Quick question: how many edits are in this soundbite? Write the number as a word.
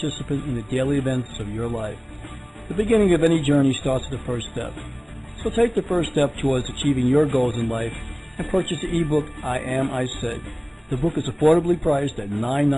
one